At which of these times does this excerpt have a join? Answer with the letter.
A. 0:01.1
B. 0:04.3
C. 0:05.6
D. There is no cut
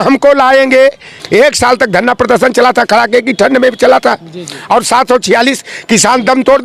A